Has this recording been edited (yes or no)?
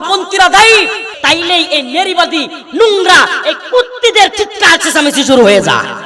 yes